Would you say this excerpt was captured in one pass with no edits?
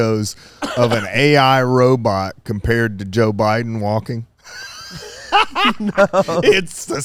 yes; 0 cuts

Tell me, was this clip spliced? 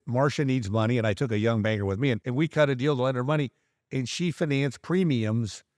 yes; 1 cut; at 2.2 s

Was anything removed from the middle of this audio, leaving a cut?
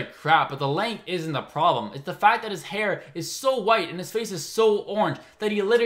no; 0 cuts

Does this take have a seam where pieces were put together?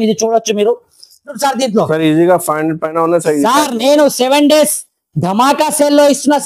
yes; 1 cut; at 1.4 s

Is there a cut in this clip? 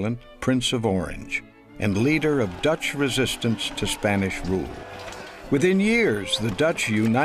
no; 0 cuts

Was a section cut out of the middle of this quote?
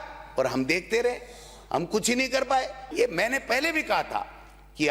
yes; 1 cut; at 2.8 s

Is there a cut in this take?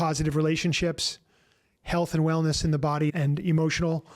yes; 1 cut; at 3.1 s

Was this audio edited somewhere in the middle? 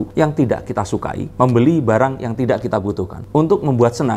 no; 0 cuts

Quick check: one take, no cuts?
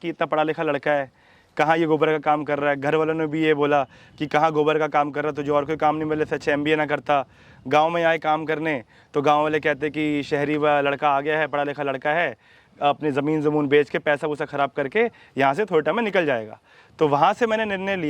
yes; 0 cuts

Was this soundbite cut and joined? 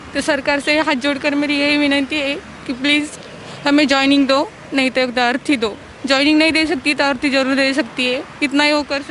no; 0 cuts

